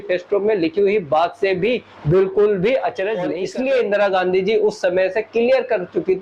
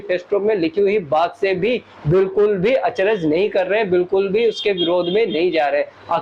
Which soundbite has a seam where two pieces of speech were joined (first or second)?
first